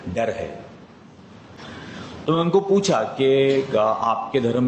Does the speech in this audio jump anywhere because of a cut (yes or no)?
yes